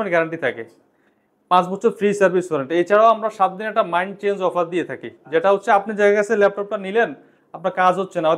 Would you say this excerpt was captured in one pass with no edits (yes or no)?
yes